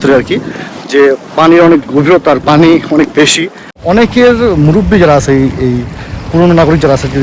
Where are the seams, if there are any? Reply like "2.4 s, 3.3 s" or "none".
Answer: 3.8 s